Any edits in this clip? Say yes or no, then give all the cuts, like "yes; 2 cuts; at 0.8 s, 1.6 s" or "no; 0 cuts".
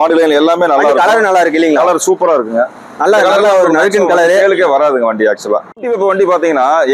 yes; 1 cut; at 5.6 s